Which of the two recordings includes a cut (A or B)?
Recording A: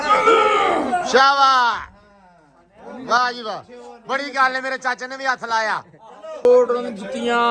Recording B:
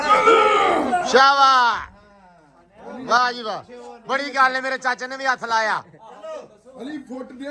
A